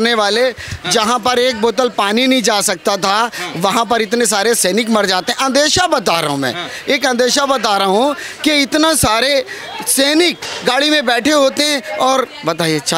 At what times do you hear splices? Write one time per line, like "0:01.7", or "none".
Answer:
none